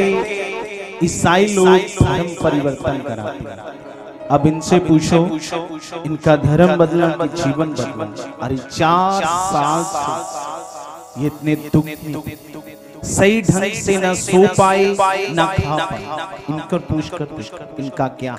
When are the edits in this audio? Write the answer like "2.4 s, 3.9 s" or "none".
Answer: none

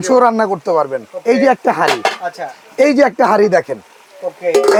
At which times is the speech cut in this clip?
none

